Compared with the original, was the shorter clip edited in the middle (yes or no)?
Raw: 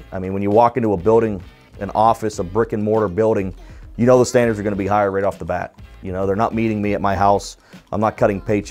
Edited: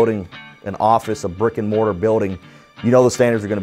no